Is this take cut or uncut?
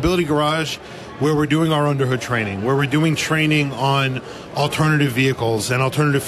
uncut